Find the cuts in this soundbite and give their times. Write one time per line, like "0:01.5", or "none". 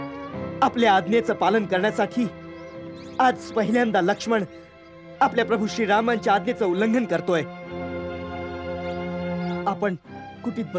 none